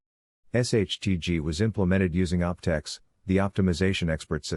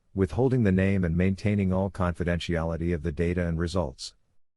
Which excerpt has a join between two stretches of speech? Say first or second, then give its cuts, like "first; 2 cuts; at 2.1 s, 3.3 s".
second; 1 cut; at 3.2 s